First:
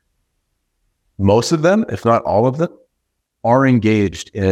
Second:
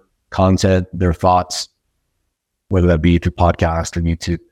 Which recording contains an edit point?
second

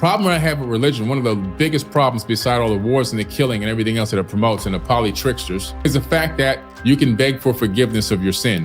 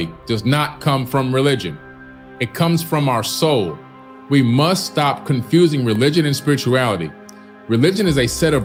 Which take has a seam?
first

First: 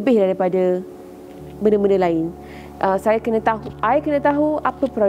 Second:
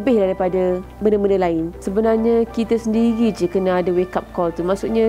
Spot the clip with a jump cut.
second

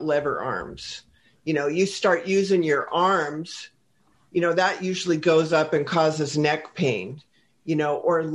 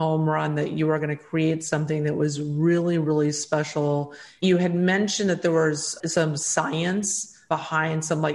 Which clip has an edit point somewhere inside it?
second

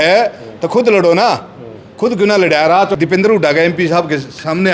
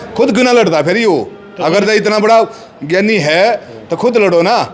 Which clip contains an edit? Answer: first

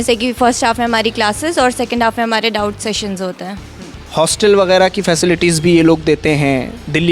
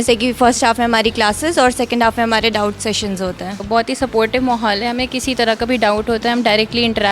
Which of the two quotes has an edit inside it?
second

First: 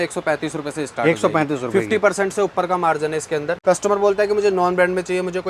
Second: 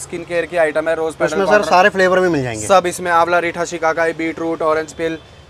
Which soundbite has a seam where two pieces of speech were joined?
first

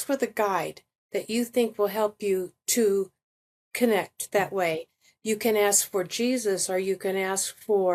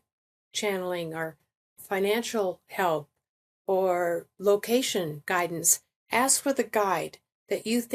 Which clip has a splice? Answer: second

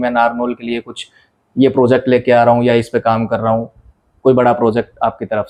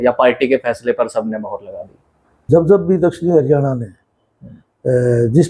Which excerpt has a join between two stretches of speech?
second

